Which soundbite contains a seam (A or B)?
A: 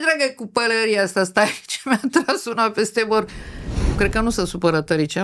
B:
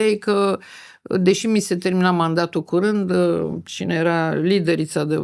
A